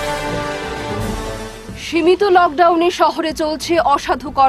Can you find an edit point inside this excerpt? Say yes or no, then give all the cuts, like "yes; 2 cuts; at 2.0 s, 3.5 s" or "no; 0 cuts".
no; 0 cuts